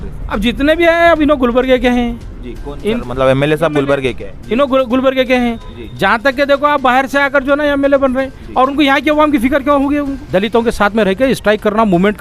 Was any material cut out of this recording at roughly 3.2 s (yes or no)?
no